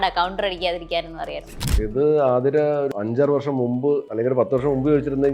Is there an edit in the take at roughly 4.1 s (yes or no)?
yes